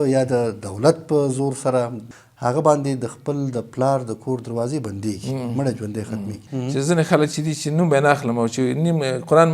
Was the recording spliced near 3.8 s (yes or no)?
no